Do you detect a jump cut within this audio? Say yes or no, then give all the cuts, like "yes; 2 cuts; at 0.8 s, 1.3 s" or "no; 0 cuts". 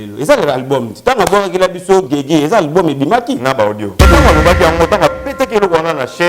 yes; 1 cut; at 4.0 s